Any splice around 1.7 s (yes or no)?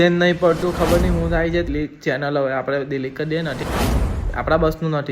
yes